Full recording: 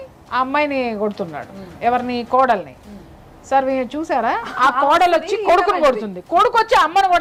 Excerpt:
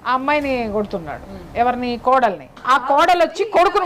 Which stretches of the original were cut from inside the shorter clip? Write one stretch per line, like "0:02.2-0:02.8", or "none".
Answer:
0:02.8-0:04.5